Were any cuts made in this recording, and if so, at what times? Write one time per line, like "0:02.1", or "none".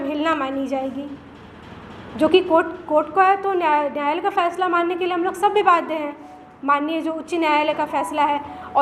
none